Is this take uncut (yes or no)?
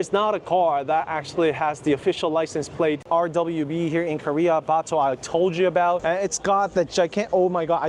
no